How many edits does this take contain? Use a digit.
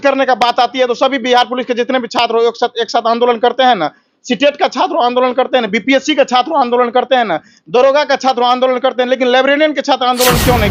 0